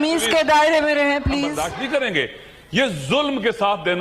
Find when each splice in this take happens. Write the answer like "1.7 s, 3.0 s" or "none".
1.7 s

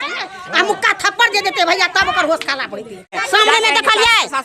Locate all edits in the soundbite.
3.2 s

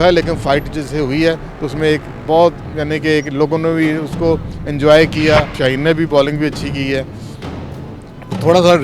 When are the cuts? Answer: 5.5 s

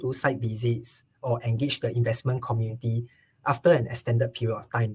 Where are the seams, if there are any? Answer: none

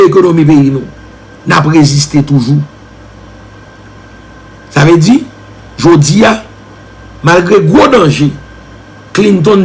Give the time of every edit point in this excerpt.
none

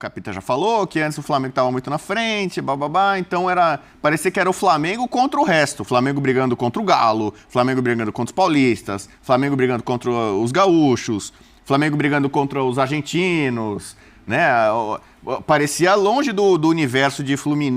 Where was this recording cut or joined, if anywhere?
none

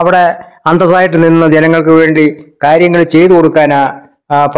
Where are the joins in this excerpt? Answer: none

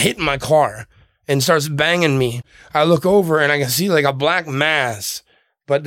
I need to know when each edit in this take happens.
2.4 s

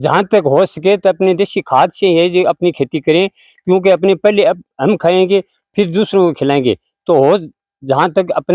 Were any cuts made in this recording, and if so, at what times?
none

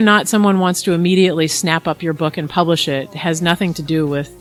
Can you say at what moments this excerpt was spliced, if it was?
none

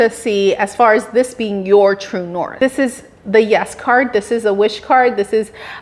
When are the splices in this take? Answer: 2.5 s

